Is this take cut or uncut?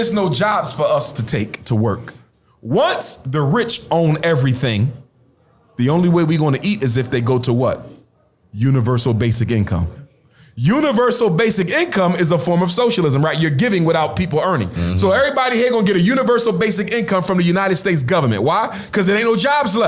uncut